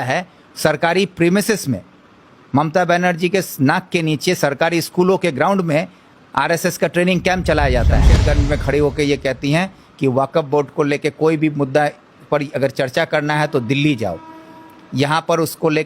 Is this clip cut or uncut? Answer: cut